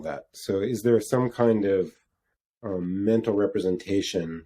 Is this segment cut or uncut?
uncut